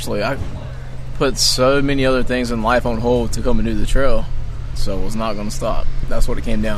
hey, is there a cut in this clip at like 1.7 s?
no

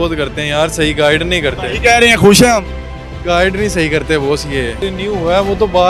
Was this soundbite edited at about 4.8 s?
yes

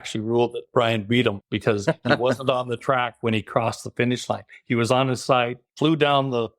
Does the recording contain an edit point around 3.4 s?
no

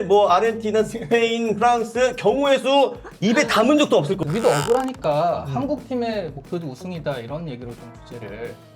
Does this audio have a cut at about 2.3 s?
no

